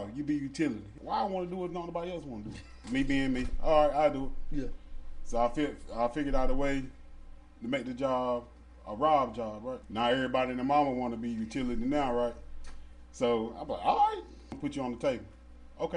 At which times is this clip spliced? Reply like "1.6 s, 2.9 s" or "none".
0.9 s, 2.7 s, 9.9 s, 14.6 s